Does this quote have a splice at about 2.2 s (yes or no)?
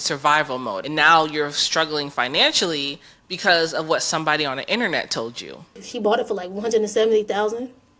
no